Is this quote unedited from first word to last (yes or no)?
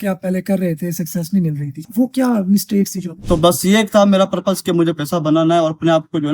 no